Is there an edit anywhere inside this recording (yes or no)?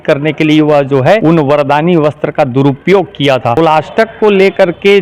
yes